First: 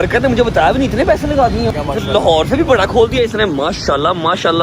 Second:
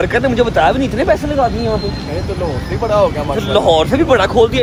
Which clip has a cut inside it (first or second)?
first